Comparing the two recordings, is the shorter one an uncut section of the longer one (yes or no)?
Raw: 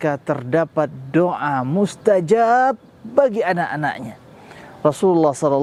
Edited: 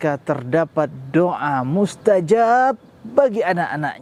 yes